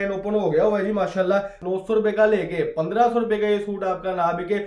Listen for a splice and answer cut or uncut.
cut